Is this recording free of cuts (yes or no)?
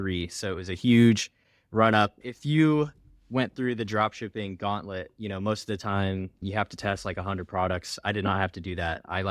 no